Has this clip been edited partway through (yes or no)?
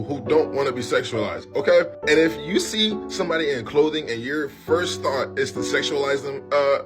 yes